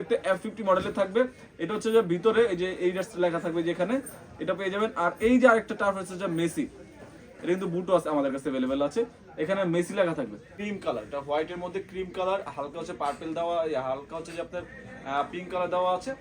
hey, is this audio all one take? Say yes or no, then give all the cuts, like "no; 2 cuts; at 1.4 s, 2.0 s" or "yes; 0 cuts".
no; 1 cut; at 10.5 s